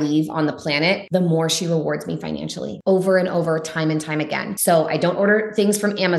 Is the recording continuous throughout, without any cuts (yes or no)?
no